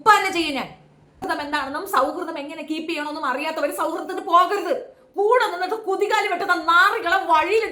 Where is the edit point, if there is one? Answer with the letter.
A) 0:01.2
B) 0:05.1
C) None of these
A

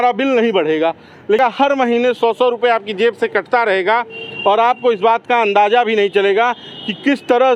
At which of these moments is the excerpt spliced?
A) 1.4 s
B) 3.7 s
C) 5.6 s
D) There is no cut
A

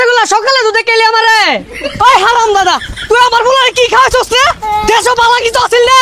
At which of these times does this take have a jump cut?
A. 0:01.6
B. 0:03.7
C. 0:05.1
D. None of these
A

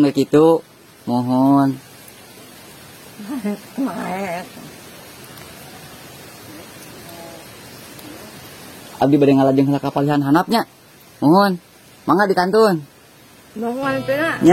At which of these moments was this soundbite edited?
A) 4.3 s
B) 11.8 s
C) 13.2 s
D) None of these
D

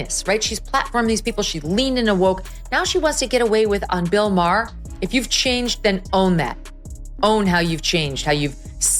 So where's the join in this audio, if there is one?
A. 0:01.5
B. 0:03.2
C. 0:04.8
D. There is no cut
C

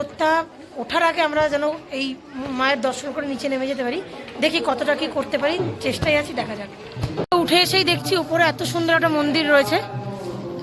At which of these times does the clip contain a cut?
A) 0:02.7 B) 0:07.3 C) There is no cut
B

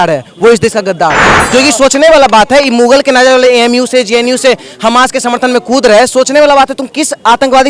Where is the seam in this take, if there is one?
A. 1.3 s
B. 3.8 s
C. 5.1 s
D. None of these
A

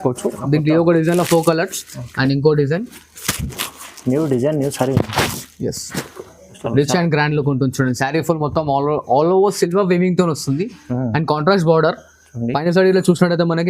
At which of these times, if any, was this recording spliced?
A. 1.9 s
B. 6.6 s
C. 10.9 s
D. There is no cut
B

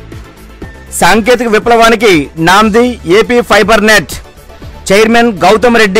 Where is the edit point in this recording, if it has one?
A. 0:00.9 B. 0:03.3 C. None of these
A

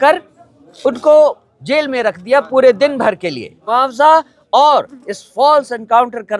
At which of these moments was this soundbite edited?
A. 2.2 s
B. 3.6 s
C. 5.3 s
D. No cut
B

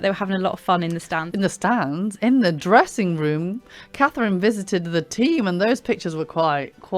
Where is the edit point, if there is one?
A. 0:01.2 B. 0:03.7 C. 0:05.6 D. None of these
A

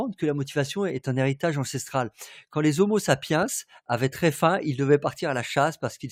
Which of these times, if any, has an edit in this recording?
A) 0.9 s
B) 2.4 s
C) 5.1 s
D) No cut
D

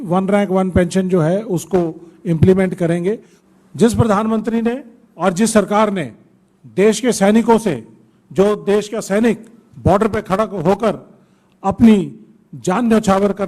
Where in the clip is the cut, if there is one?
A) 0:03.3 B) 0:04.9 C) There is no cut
A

